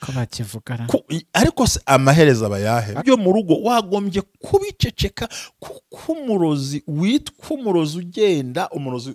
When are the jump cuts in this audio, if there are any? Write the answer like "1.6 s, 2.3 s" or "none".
3.0 s